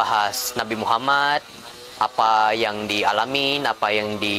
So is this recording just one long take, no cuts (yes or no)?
yes